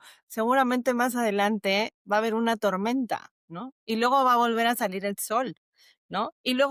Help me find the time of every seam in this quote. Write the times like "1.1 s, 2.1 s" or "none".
none